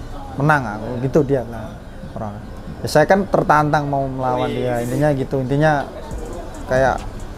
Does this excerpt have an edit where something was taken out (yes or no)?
no